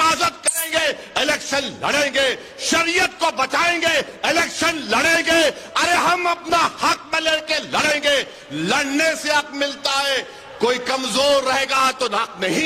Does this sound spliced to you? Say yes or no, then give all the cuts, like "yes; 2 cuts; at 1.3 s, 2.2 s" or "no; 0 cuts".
no; 0 cuts